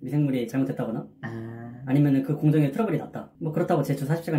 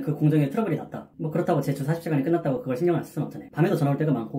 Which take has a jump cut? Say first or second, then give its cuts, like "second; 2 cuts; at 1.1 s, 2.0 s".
second; 1 cut; at 3.4 s